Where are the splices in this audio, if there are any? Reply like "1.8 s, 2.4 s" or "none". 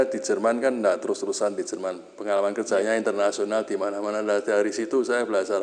none